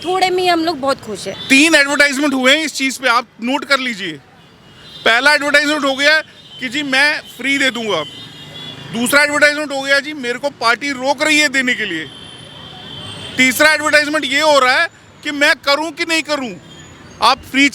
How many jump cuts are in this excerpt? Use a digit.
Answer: 1